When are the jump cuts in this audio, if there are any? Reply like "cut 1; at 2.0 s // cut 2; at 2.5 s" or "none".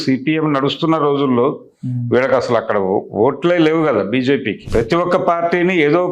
cut 1; at 4.6 s

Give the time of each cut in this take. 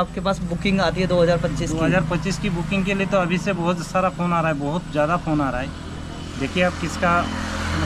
none

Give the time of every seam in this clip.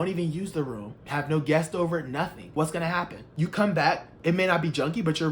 cut 1; at 0.9 s // cut 2; at 2.4 s // cut 3; at 3.2 s // cut 4; at 4.1 s

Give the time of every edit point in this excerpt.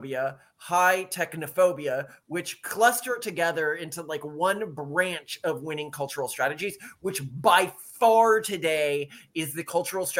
none

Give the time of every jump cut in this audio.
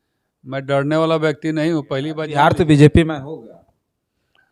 cut 1; at 2.2 s

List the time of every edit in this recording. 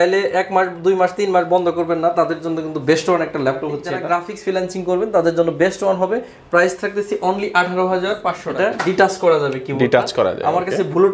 cut 1; at 3.9 s // cut 2; at 8.5 s

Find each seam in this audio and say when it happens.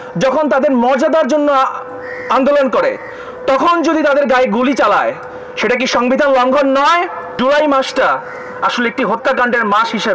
cut 1; at 7.2 s

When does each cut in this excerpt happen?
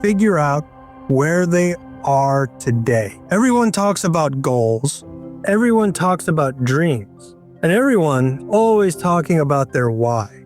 cut 1; at 3.2 s // cut 2; at 8.4 s

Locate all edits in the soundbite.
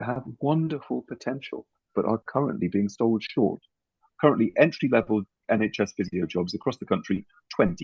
cut 1; at 4.0 s

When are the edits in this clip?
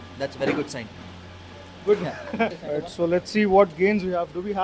cut 1; at 2.7 s

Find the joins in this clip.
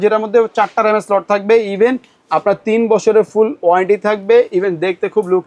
none

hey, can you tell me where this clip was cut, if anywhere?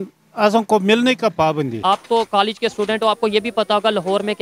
cut 1; at 1.8 s

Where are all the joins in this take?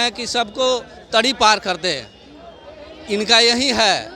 none

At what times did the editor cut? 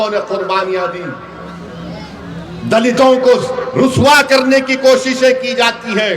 none

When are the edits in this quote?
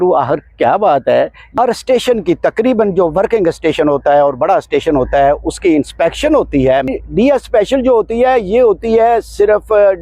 cut 1; at 1.5 s // cut 2; at 6.9 s

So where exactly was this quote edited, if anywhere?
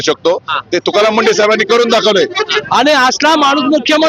cut 1; at 2.6 s

